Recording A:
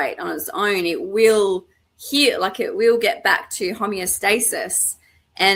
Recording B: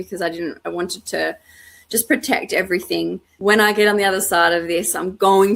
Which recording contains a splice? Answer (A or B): B